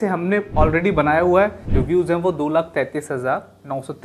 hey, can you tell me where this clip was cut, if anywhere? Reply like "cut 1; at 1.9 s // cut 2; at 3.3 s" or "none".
cut 1; at 1.7 s